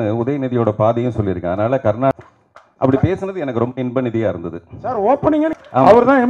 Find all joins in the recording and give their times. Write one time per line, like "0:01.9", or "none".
0:02.1
0:05.5